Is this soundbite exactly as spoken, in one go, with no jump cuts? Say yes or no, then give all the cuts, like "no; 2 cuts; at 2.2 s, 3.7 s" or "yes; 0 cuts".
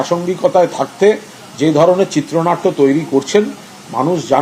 yes; 0 cuts